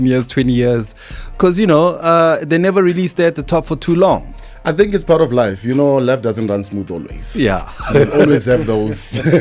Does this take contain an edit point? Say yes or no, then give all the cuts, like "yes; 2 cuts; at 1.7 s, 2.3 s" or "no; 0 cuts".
no; 0 cuts